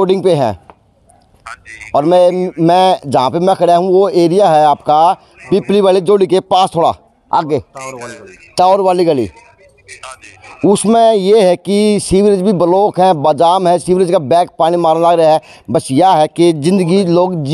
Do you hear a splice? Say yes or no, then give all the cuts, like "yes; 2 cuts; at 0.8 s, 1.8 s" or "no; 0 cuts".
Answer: no; 0 cuts